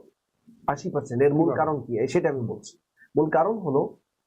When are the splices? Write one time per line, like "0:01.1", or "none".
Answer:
none

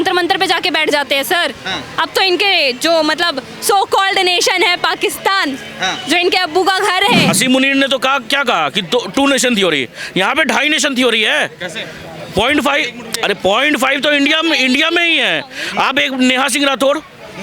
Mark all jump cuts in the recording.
0:07.3

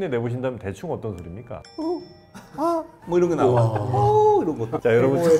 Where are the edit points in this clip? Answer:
0:01.7

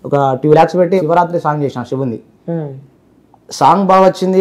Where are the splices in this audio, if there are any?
0:01.0

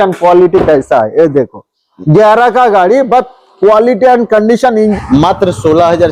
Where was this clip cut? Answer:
0:04.9

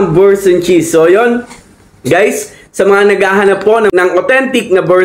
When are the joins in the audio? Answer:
0:03.9

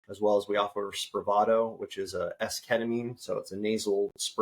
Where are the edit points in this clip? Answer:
none

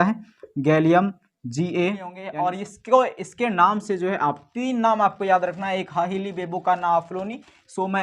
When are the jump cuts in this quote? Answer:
0:02.2

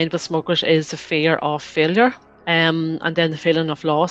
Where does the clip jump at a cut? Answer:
0:02.3

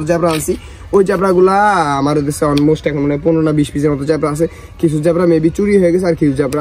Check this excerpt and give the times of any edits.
none

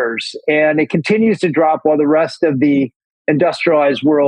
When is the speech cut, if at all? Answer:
0:03.1

